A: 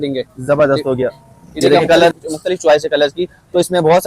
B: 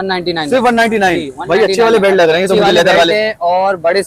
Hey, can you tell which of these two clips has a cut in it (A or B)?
A